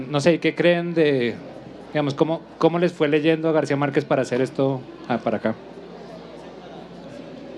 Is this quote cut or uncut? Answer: uncut